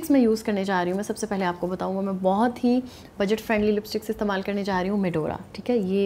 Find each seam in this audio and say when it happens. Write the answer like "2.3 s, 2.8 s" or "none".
none